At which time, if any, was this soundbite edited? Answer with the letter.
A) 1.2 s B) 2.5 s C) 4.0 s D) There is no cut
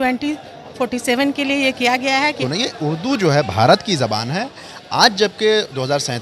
B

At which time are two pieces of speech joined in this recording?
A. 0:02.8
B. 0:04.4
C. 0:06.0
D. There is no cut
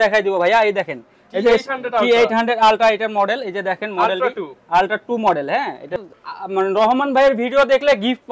C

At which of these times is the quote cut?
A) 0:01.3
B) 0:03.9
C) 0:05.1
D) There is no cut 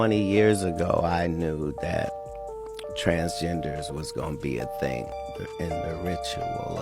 C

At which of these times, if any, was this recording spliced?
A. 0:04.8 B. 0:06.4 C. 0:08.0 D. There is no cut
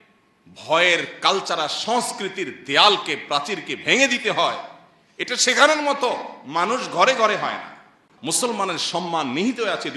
C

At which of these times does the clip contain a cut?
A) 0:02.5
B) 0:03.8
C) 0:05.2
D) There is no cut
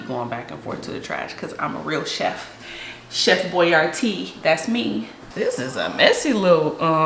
C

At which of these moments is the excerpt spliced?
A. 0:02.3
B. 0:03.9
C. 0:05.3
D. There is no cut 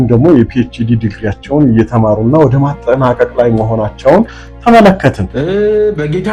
C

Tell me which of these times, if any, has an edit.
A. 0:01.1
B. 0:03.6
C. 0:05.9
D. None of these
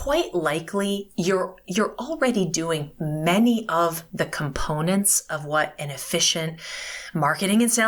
D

